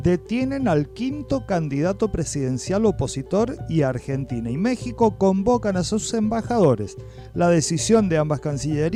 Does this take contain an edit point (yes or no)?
no